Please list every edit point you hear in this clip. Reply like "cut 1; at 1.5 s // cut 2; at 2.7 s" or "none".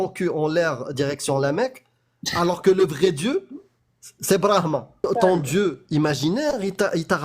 cut 1; at 5.0 s